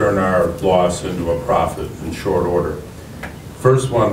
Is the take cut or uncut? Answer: uncut